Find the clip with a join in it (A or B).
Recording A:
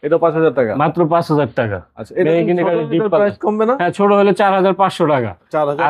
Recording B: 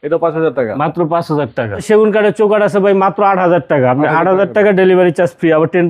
B